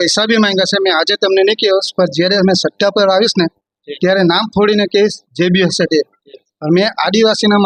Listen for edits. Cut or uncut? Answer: uncut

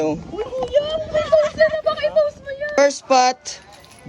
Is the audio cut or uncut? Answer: cut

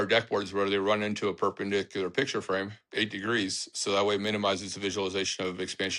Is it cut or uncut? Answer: uncut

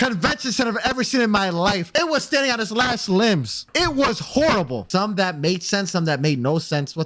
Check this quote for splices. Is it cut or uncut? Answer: cut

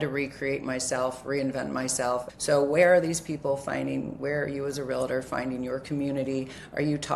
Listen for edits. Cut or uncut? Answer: cut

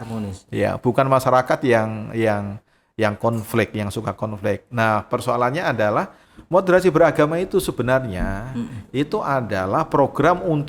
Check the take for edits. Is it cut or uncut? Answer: cut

